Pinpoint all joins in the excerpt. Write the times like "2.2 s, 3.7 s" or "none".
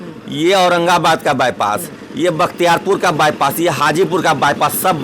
none